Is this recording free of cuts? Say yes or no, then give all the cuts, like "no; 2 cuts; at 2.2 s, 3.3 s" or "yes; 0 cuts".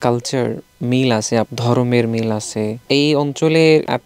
no; 2 cuts; at 1.5 s, 2.8 s